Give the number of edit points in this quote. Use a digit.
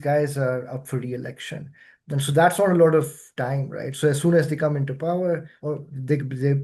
0